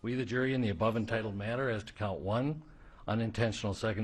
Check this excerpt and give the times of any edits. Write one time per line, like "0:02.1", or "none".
none

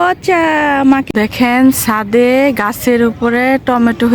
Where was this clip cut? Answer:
0:01.1

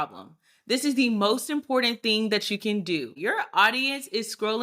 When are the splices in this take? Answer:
0:03.1

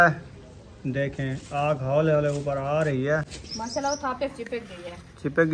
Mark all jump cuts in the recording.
none

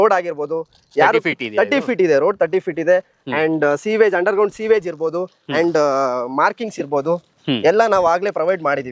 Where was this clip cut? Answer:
none

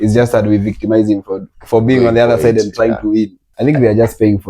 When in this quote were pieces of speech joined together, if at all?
0:01.5
0:03.5

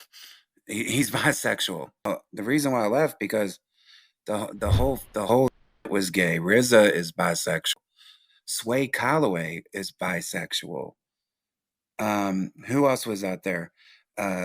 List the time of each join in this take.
0:02.1

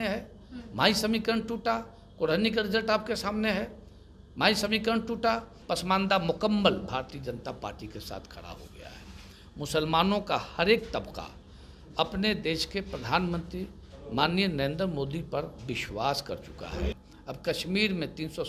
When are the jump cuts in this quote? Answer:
0:05.5
0:16.9

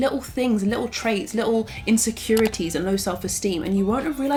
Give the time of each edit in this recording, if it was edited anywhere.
none

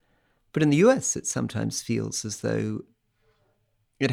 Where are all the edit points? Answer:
0:02.9

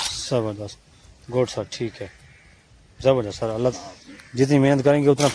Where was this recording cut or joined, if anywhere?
0:03.7

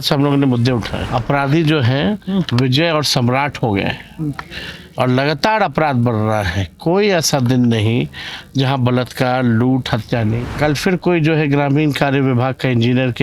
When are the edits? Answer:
0:01.0
0:10.5

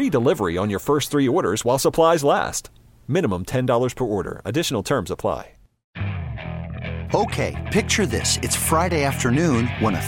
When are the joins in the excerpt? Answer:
0:05.8

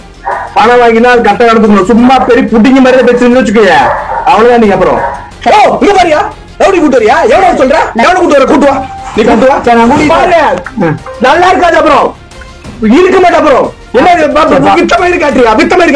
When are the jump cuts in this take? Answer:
0:05.3
0:08.0

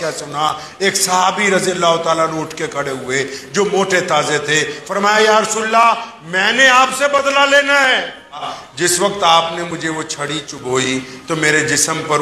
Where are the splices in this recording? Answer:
0:08.6

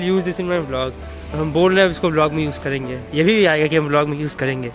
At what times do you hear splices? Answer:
none

